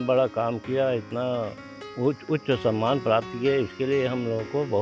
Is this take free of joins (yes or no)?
yes